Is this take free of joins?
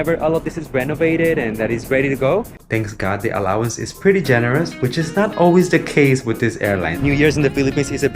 no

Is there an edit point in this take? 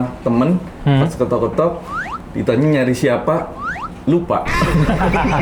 no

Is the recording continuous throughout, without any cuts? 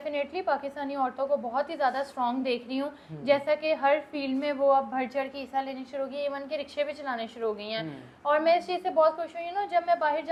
yes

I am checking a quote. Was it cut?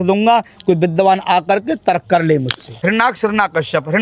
yes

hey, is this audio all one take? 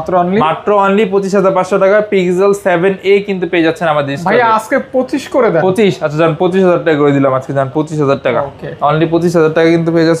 yes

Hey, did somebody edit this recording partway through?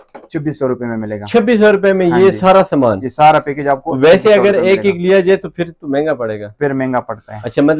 no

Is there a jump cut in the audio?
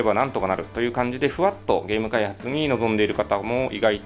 no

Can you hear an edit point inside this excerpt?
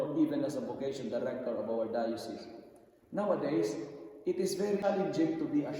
yes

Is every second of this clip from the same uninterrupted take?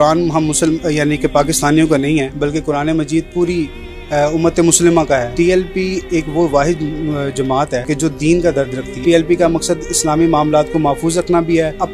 no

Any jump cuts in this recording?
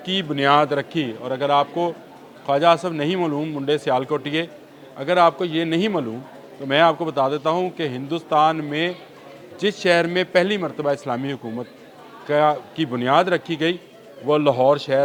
no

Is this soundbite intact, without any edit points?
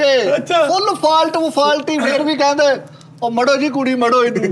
yes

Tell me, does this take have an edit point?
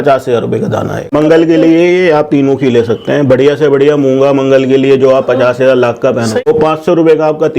yes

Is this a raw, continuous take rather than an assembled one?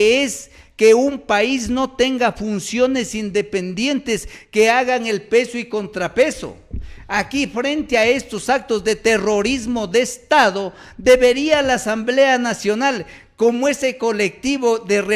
yes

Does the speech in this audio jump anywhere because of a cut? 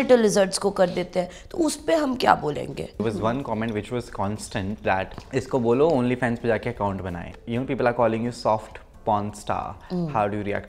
yes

